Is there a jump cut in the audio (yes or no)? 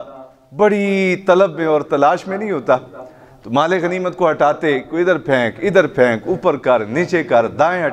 no